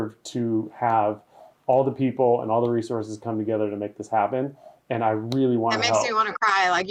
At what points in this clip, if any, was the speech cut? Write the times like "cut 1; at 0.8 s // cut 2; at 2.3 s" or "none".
none